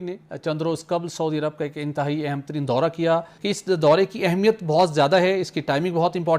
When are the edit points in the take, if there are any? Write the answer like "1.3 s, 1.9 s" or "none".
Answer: 3.3 s